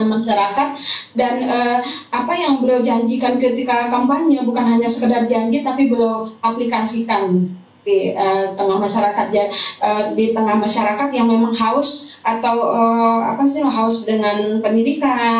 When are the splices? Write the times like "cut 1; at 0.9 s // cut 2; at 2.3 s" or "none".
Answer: none